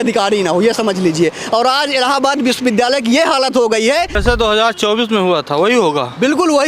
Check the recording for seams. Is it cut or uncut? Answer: cut